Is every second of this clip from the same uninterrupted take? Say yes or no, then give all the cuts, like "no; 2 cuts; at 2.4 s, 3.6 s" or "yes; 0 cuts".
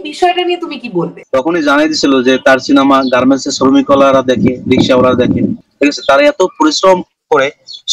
no; 2 cuts; at 1.2 s, 5.6 s